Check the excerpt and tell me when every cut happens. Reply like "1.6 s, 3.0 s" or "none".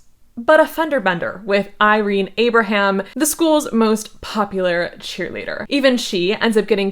5.6 s